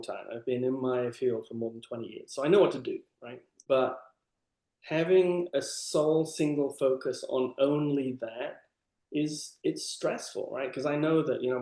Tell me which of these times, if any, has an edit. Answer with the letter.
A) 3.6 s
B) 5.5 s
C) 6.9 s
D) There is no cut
A